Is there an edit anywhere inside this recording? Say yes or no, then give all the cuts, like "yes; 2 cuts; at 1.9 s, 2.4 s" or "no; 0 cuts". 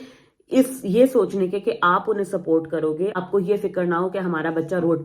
yes; 1 cut; at 3.2 s